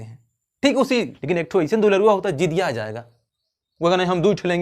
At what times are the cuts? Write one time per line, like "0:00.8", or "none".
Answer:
0:01.2